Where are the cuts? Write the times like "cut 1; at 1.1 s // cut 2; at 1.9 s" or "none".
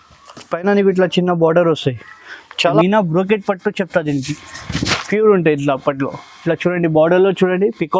cut 1; at 2.6 s